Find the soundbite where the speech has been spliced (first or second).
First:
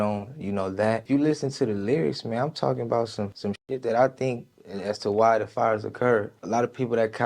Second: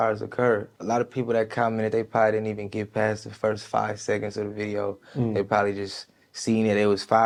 first